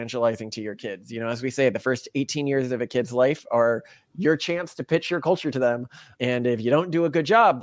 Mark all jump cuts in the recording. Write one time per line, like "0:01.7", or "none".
none